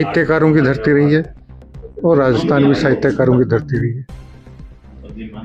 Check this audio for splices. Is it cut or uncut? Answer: uncut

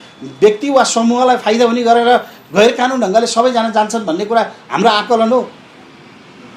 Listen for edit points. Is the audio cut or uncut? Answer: uncut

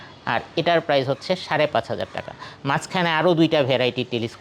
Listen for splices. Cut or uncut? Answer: uncut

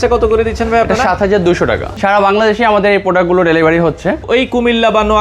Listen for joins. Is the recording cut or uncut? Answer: cut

